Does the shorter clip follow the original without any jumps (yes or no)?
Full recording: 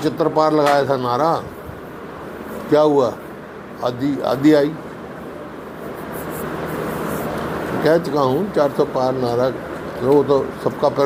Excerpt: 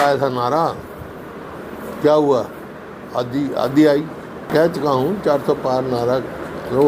no